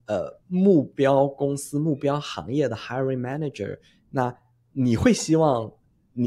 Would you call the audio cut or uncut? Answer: uncut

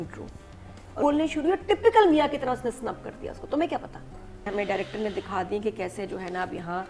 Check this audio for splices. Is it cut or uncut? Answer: cut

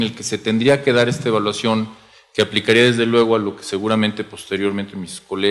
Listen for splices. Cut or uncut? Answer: cut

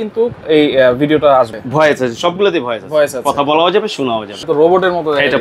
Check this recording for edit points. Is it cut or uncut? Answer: cut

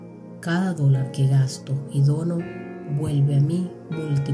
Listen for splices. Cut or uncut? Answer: uncut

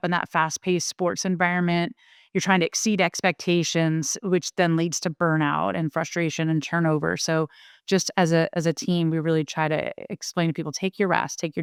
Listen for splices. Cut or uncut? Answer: uncut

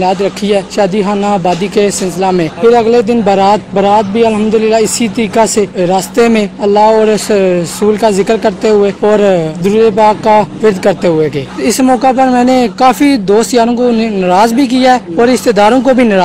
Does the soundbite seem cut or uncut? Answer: cut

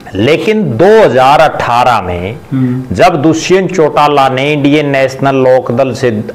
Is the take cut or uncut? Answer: uncut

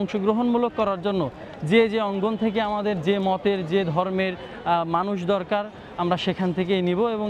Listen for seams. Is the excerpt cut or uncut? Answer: uncut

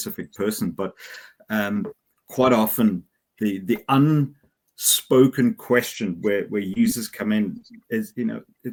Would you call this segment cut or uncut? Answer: uncut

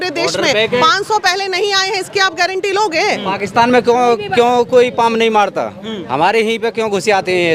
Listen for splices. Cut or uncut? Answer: uncut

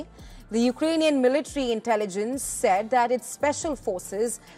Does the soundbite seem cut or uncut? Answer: uncut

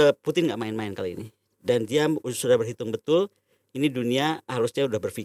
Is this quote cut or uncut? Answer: uncut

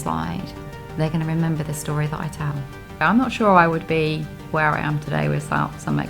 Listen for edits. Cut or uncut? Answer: cut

